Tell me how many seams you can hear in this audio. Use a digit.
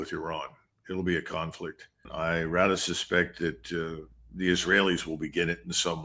1